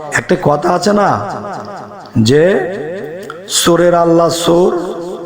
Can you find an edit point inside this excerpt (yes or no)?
no